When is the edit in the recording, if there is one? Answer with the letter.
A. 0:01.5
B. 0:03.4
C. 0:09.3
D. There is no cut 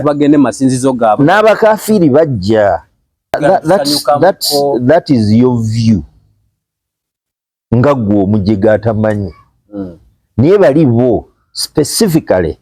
B